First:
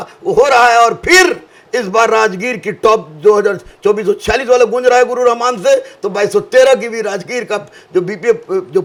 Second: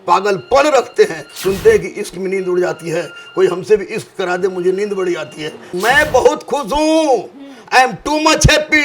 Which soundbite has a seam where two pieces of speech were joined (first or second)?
second